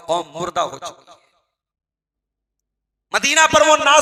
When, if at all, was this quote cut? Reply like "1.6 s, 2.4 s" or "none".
none